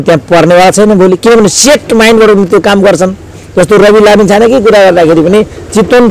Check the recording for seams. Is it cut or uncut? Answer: uncut